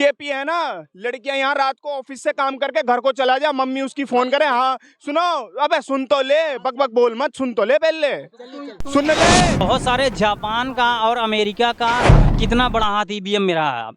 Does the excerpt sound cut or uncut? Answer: cut